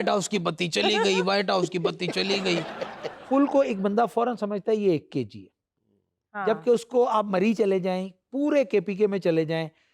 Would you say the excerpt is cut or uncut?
cut